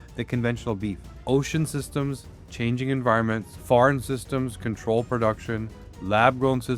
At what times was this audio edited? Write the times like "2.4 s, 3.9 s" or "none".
1.1 s